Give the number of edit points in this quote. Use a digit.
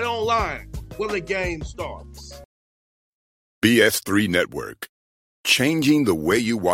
1